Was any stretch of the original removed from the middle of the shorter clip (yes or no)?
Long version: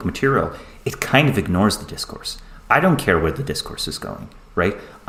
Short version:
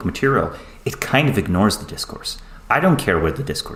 no